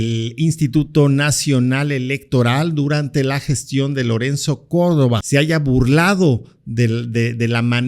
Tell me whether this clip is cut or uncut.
cut